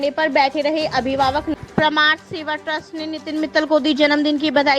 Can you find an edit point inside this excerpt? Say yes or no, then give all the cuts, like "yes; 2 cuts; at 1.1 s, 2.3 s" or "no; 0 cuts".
yes; 1 cut; at 1.5 s